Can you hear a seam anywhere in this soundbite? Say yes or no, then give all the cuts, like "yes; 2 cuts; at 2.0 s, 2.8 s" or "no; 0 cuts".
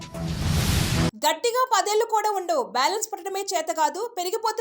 yes; 1 cut; at 1.1 s